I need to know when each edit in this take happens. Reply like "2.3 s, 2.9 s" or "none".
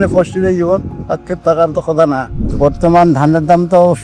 2.4 s